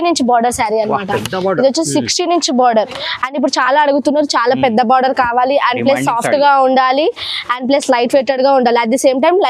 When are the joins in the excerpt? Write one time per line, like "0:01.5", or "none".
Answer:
none